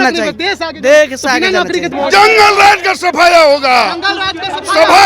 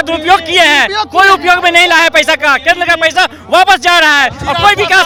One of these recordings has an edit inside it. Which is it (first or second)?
first